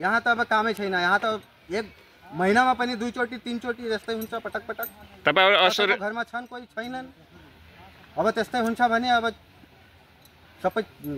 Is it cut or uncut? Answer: uncut